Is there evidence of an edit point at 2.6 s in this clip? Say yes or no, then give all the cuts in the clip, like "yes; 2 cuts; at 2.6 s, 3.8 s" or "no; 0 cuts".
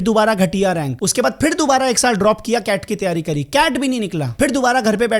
no; 2 cuts; at 1.0 s, 4.2 s